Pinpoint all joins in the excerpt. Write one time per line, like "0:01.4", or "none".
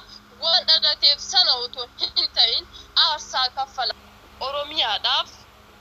0:03.9